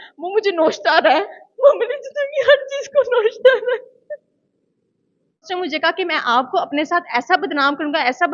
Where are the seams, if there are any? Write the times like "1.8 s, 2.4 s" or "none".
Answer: 5.4 s